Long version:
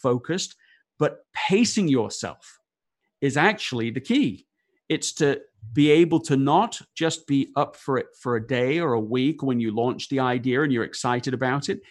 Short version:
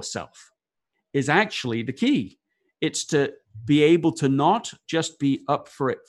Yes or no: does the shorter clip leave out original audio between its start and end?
no